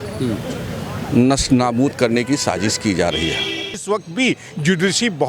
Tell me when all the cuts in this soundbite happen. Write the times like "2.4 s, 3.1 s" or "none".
3.6 s